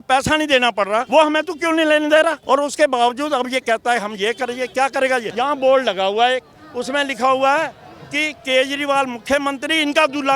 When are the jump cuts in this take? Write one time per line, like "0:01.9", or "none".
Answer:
0:01.1
0:02.4
0:05.3